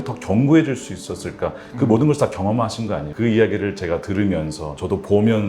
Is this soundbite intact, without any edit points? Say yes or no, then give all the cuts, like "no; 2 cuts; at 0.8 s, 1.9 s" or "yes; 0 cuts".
no; 1 cut; at 3.1 s